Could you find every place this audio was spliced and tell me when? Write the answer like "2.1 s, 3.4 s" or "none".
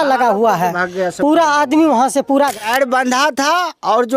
2.5 s